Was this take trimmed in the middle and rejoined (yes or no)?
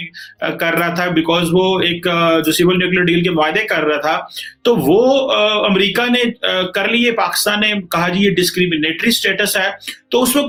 no